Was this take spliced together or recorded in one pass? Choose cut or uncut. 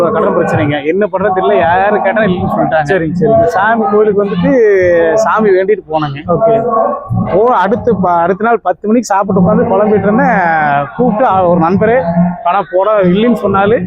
uncut